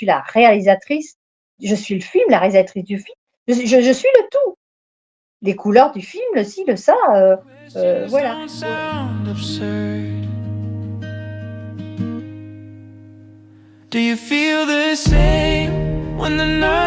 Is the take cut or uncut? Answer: cut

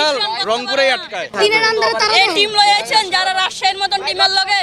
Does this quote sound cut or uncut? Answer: cut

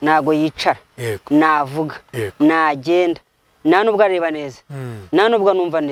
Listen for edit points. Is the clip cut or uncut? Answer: uncut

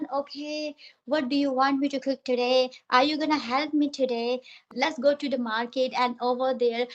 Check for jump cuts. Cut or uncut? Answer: uncut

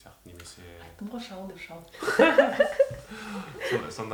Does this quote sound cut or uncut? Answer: uncut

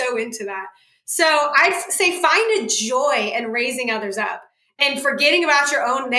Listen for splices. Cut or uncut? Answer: cut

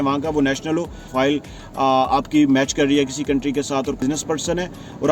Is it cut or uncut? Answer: cut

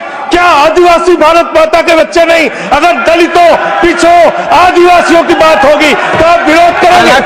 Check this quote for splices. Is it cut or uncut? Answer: uncut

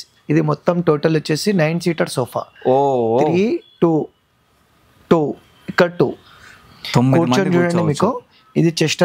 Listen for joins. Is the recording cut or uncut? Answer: uncut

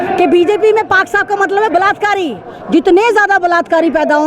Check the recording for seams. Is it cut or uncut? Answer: cut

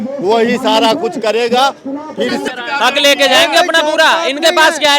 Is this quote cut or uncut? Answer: cut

